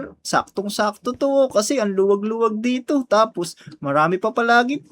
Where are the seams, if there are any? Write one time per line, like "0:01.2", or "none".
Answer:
none